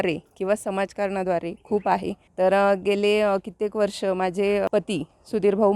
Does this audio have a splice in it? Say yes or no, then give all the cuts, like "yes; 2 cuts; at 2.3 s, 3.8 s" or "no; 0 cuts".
yes; 2 cuts; at 2.2 s, 4.7 s